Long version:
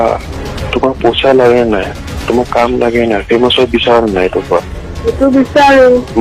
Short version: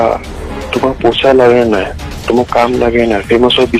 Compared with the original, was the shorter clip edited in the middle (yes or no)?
no